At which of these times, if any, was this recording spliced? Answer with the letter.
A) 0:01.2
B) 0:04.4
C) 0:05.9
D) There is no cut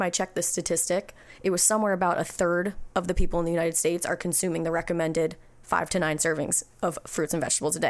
D